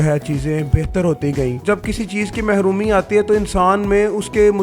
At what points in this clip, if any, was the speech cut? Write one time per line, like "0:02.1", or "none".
0:01.6